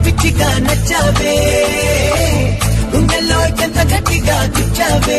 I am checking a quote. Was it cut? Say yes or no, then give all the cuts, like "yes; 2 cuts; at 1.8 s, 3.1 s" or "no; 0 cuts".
no; 0 cuts